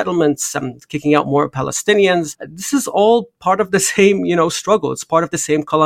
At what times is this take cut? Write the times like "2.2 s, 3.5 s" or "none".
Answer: none